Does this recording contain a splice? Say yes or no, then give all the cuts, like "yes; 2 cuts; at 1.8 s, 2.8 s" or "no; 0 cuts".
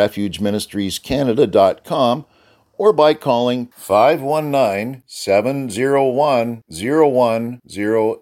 no; 0 cuts